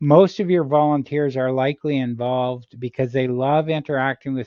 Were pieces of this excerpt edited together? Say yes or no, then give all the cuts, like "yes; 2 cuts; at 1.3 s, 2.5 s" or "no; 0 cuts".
no; 0 cuts